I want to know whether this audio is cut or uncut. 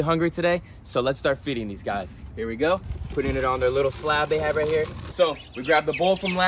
cut